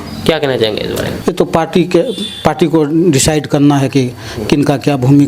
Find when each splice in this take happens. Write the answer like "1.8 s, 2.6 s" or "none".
1.1 s

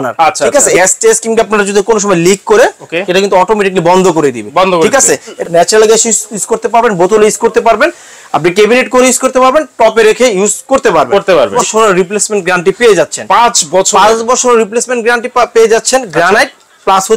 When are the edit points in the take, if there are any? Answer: 0.8 s, 5.4 s, 11.5 s

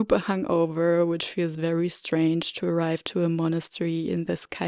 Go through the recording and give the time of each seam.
none

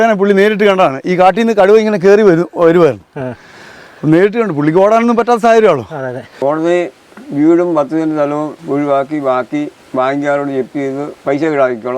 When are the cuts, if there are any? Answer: 6.2 s, 8.6 s, 9.8 s, 11.1 s

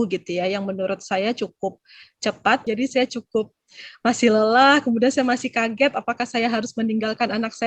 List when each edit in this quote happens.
2.6 s

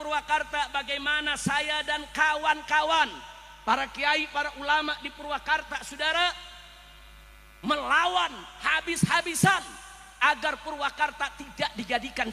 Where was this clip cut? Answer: none

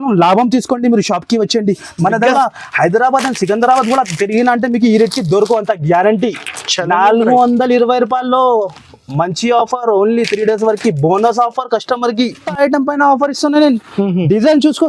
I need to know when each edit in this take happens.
2.3 s, 12.4 s

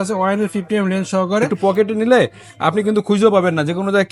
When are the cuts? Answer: 1.5 s

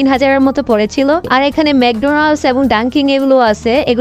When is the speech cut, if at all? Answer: 1.3 s

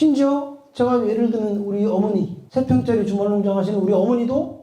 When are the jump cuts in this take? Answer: 2.4 s

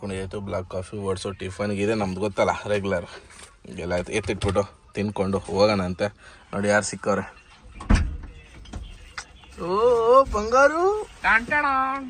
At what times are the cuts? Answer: none

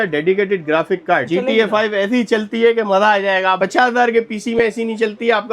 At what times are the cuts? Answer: 1.3 s

